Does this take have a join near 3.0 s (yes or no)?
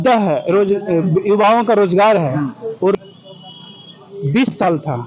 no